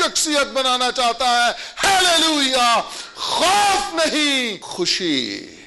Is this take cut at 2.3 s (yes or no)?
no